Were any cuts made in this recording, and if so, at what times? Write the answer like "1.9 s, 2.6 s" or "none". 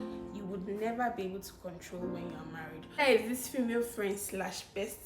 3.0 s